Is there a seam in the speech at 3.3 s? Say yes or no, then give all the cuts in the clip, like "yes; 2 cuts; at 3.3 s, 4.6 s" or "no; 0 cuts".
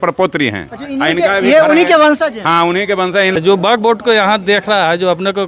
yes; 1 cut; at 3.3 s